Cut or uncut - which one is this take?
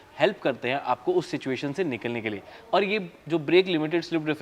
uncut